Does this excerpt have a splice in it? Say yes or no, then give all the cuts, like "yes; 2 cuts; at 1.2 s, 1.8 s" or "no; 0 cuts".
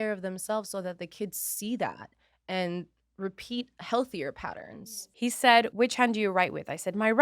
yes; 2 cuts; at 4.8 s, 5.7 s